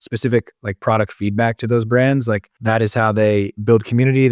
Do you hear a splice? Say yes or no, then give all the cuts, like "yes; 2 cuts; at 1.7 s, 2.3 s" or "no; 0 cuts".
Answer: yes; 1 cut; at 2.5 s